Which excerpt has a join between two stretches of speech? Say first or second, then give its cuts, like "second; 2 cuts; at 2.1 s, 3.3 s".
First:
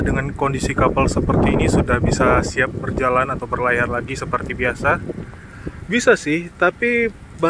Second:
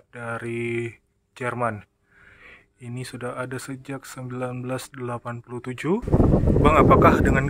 second; 1 cut; at 6.0 s